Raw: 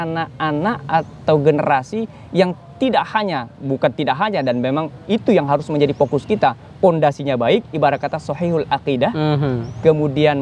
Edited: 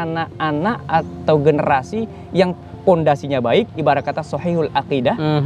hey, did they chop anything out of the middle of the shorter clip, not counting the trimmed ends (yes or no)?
yes